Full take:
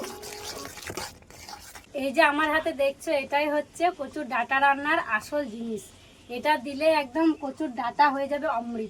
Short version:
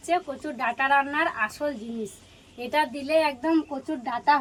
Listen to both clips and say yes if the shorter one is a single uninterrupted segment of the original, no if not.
yes